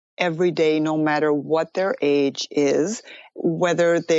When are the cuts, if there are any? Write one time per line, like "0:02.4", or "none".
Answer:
none